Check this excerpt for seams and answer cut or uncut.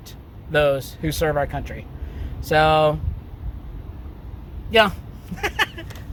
uncut